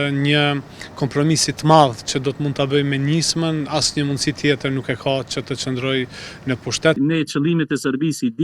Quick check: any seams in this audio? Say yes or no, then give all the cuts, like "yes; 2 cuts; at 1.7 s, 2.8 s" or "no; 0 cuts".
yes; 1 cut; at 7.0 s